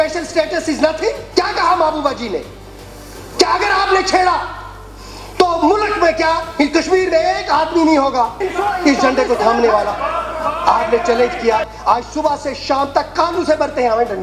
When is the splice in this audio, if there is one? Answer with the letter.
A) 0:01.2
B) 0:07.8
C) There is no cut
A